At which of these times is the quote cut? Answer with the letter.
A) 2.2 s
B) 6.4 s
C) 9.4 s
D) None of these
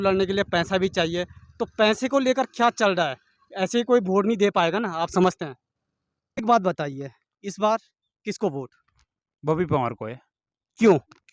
B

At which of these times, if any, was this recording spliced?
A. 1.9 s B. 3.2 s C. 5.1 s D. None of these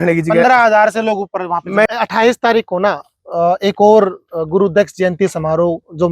A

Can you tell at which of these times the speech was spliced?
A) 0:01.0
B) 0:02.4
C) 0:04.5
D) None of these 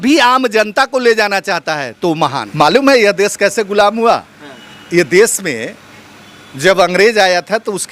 B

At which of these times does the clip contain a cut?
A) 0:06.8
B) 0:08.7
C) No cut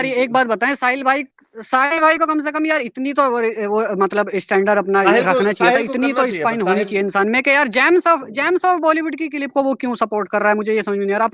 C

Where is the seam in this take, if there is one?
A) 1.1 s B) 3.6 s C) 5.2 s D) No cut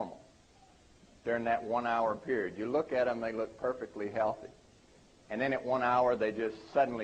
A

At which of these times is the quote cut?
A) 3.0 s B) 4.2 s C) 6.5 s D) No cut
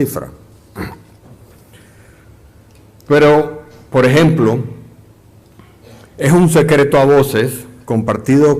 C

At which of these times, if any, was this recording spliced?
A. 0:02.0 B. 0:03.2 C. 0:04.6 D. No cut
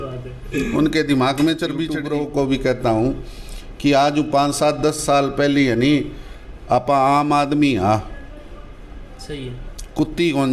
A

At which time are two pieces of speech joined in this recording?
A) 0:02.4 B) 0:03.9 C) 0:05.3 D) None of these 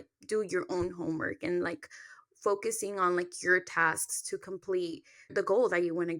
C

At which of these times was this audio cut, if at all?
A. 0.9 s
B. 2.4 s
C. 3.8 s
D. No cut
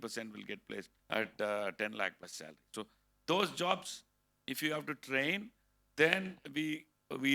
A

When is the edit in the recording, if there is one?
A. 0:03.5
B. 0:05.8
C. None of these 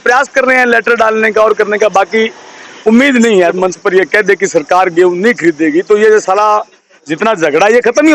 A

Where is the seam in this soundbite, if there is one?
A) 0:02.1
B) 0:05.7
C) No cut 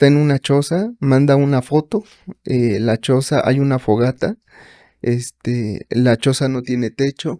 C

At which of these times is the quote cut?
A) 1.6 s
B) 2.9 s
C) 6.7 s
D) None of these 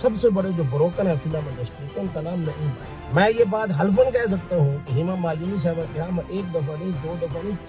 B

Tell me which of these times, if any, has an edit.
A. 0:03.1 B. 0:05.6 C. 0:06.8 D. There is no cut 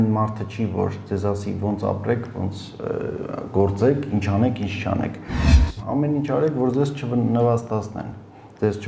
B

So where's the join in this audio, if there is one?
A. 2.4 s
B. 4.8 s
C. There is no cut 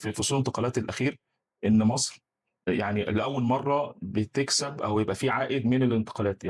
C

